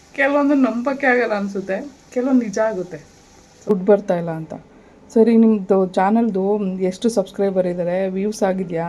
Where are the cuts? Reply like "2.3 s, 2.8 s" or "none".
3.7 s